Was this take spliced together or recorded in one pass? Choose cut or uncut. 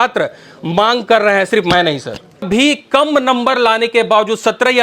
cut